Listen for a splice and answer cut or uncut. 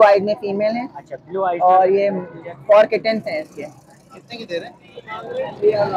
uncut